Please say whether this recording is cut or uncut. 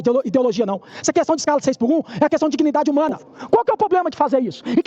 cut